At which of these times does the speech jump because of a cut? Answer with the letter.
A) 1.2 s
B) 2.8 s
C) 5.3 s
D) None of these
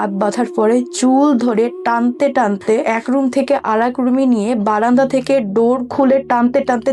B